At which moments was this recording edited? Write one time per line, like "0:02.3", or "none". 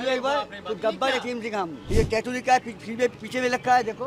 0:01.8